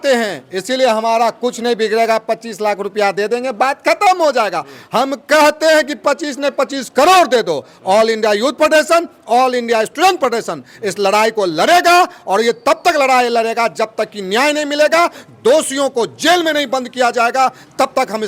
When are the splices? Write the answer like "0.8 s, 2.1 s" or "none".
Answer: none